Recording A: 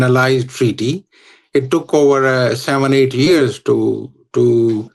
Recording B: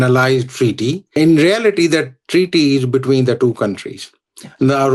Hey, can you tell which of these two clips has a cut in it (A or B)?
B